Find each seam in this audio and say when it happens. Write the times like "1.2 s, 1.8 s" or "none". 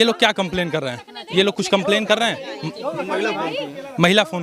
none